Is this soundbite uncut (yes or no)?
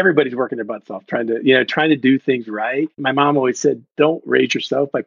no